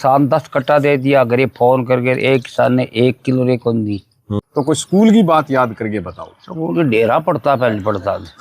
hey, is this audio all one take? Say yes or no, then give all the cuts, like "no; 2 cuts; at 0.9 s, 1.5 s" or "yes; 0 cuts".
no; 1 cut; at 4.4 s